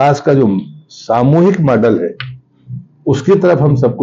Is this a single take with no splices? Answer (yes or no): yes